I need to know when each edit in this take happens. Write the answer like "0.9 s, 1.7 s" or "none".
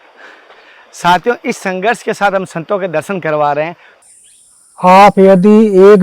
3.8 s